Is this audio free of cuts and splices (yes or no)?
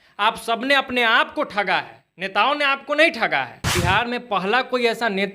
no